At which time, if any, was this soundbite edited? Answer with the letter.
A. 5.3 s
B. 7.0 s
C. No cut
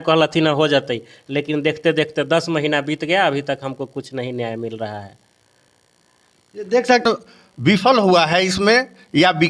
B